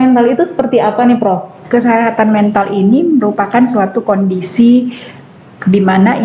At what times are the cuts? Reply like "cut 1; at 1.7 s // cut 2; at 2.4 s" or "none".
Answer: cut 1; at 1.6 s